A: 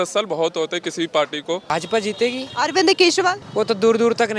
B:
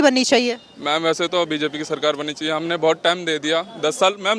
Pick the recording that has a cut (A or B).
A